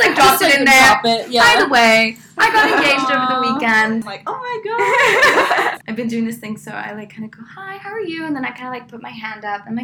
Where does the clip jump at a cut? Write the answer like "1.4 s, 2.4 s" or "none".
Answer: 4.1 s, 5.8 s